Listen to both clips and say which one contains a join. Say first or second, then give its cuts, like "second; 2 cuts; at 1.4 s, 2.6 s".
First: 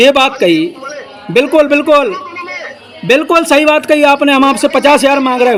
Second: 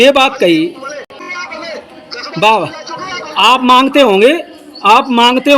second; 1 cut; at 1.2 s